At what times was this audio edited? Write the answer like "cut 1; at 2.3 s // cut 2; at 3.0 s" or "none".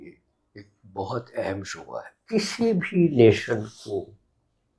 cut 1; at 2.1 s

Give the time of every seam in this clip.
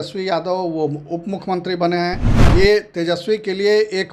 cut 1; at 2.3 s

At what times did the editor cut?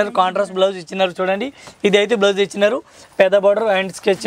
none

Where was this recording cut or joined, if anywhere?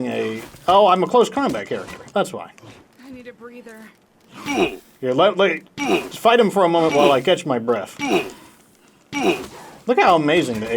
none

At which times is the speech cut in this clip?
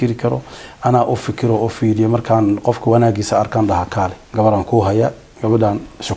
cut 1; at 4.2 s

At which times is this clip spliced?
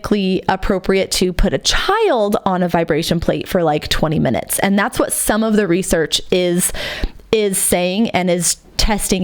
none

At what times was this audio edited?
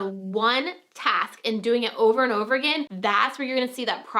cut 1; at 2.9 s

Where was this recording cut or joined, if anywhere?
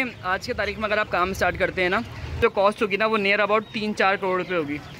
cut 1; at 2.3 s

